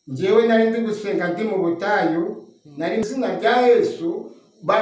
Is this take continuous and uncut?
yes; 0 cuts

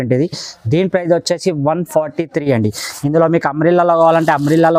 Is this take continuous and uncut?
yes; 0 cuts

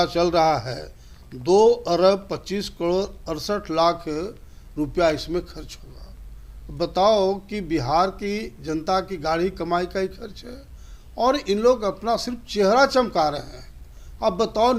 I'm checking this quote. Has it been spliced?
no; 0 cuts

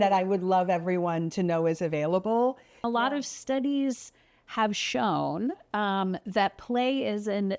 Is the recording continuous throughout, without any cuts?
no; 1 cut; at 2.8 s

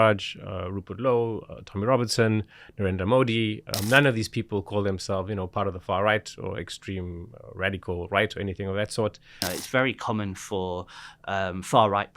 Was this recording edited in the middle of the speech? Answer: yes; 2 cuts; at 3.7 s, 9.4 s

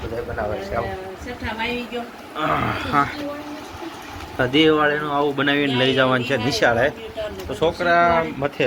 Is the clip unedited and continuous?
yes; 0 cuts

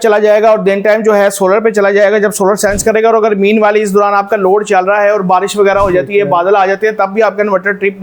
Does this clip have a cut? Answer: no; 0 cuts

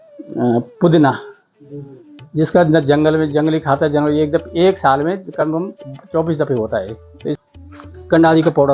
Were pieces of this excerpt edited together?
yes; 1 cut; at 7.4 s

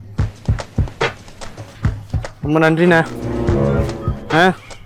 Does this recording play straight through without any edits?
no; 1 cut; at 2.4 s

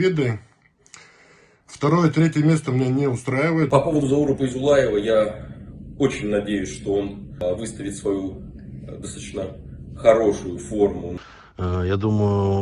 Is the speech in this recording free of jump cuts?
no; 3 cuts; at 3.7 s, 7.4 s, 11.1 s

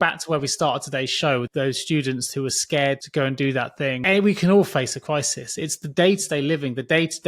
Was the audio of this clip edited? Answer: yes; 3 cuts; at 1.5 s, 3.0 s, 4.0 s

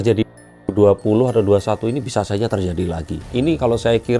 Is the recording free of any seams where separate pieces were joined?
no; 1 cut; at 3.2 s

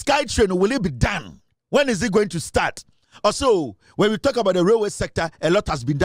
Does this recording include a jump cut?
no; 0 cuts

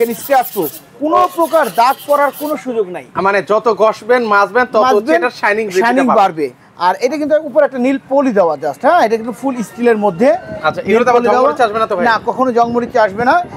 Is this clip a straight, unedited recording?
yes; 0 cuts

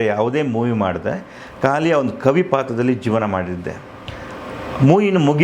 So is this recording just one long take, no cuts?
yes; 0 cuts

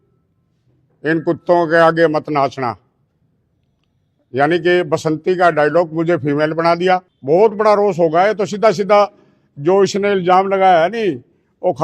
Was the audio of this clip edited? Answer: yes; 1 cut; at 7.1 s

